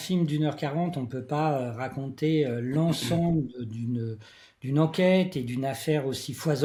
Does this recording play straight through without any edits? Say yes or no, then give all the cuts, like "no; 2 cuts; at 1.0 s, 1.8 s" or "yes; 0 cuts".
yes; 0 cuts